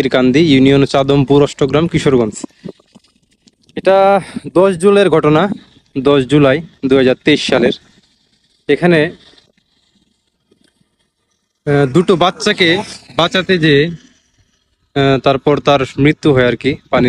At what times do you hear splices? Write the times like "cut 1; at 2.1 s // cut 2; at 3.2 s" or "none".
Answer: none